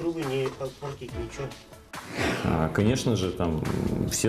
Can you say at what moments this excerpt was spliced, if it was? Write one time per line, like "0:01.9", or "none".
0:02.0